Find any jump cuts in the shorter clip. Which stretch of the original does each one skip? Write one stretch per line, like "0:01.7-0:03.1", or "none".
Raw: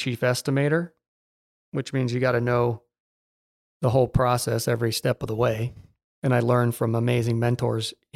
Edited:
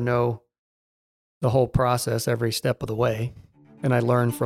none